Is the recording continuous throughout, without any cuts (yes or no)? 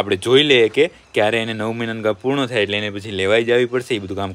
yes